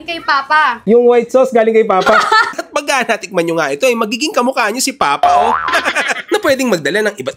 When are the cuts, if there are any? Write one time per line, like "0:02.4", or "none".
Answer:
0:00.8
0:02.5